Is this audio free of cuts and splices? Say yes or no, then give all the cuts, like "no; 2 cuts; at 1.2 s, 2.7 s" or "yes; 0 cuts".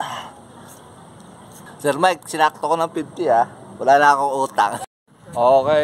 no; 2 cuts; at 1.5 s, 4.8 s